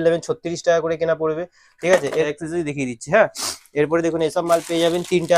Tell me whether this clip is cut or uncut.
uncut